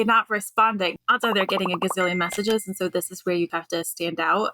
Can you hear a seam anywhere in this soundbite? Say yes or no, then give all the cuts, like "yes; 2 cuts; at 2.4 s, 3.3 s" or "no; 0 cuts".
yes; 2 cuts; at 1.0 s, 3.5 s